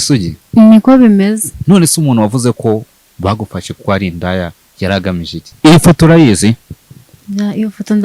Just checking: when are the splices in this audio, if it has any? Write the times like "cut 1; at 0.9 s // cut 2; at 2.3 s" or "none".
cut 1; at 1.5 s // cut 2; at 5.4 s